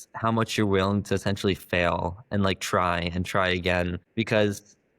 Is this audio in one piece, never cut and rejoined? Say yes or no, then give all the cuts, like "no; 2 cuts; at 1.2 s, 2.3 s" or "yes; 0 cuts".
no; 1 cut; at 4.0 s